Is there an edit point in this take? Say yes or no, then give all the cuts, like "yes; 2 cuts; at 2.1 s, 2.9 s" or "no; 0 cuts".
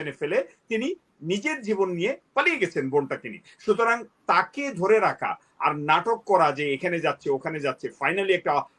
no; 0 cuts